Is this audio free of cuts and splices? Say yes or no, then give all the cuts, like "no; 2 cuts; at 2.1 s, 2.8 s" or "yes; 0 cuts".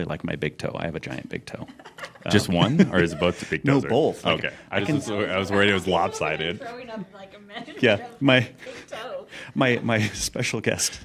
yes; 0 cuts